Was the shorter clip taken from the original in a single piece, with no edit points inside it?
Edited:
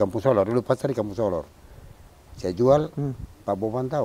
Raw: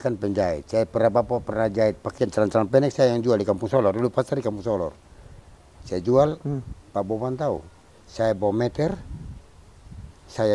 yes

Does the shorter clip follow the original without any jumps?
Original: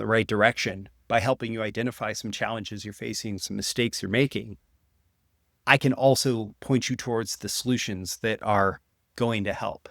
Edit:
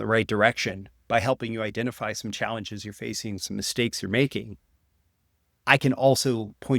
yes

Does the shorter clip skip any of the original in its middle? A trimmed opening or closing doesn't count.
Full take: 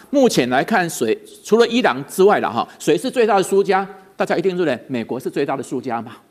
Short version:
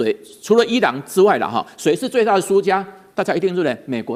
no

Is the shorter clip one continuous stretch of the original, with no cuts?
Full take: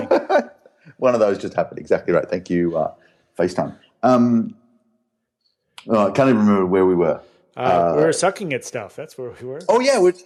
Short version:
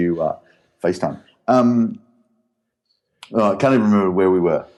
yes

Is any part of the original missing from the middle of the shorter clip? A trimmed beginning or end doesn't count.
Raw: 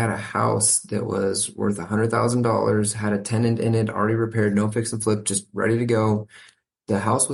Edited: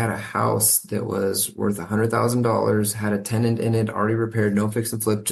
no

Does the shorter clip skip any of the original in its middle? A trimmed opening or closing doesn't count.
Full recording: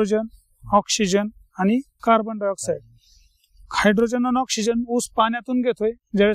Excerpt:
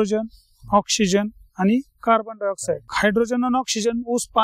yes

